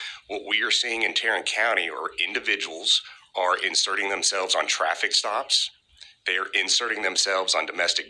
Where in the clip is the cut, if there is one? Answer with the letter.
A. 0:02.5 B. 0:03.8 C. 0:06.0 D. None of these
D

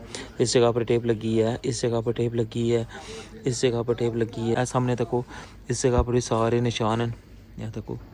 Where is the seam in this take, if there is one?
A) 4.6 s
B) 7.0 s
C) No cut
A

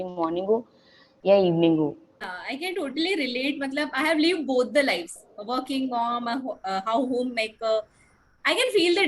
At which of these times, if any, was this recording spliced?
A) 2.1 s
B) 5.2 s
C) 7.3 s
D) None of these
A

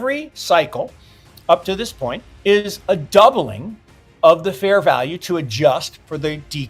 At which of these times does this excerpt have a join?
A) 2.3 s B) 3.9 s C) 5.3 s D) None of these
A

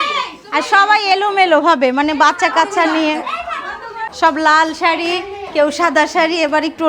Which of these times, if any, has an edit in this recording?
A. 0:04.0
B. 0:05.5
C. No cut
A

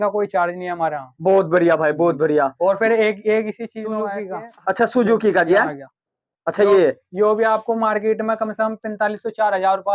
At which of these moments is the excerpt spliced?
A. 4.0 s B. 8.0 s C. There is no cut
A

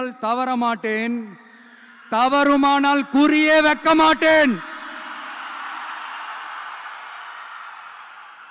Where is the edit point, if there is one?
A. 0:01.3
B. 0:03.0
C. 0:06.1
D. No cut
D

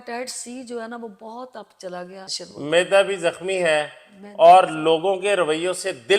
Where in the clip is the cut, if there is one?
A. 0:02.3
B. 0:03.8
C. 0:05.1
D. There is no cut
A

